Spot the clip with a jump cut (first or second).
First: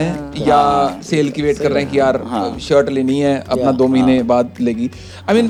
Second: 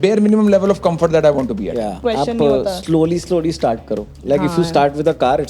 second